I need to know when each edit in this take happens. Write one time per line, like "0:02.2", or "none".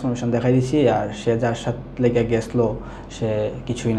none